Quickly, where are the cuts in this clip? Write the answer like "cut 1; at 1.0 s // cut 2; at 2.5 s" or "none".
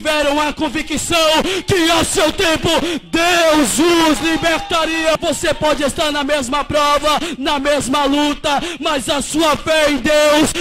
cut 1; at 5.1 s